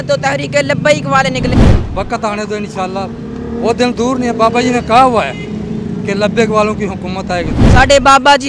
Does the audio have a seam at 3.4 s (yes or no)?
no